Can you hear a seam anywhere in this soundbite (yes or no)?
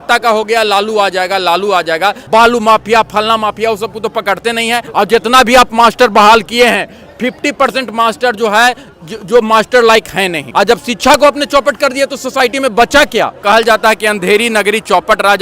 yes